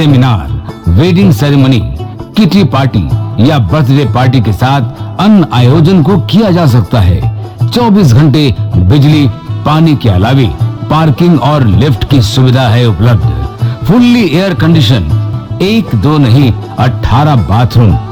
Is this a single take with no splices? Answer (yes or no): yes